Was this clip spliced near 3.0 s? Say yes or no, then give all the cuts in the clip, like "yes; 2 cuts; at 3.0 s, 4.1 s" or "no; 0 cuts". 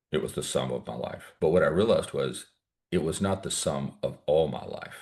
no; 1 cut; at 1.2 s